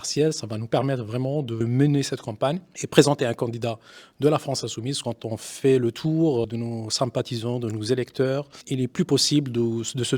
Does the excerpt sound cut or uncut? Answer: cut